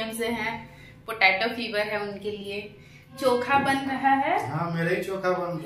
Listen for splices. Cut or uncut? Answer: cut